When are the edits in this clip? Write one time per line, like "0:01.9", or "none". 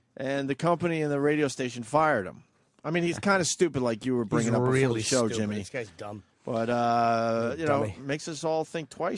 0:07.0